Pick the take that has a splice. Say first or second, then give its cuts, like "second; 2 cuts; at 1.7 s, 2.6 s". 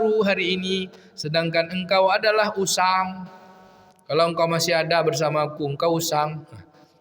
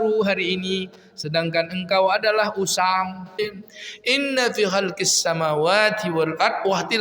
second; 1 cut; at 3.3 s